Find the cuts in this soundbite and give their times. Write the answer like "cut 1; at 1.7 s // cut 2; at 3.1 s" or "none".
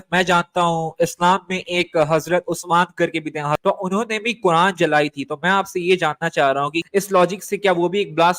cut 1; at 3.6 s // cut 2; at 6.8 s